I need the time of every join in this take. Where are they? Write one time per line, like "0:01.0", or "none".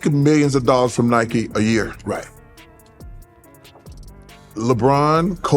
0:02.8
0:04.5